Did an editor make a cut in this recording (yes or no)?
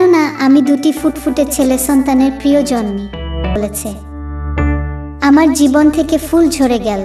yes